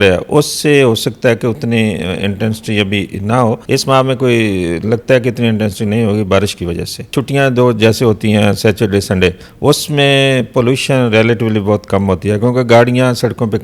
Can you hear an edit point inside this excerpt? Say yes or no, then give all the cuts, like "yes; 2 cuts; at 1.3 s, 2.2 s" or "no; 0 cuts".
yes; 2 cuts; at 3.6 s, 7.2 s